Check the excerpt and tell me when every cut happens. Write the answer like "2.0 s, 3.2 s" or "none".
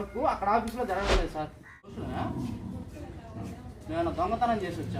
2.0 s